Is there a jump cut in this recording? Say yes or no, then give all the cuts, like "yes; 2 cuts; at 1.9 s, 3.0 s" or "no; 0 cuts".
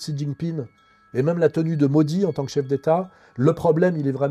no; 0 cuts